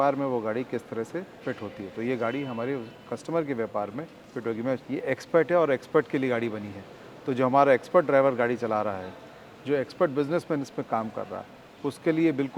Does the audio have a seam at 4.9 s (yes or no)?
yes